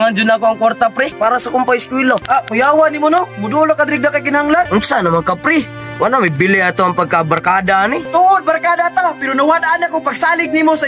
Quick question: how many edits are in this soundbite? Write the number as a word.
four